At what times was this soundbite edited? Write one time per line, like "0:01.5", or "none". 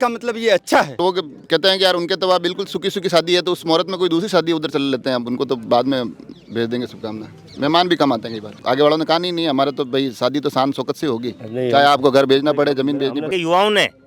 0:00.9
0:08.6
0:13.3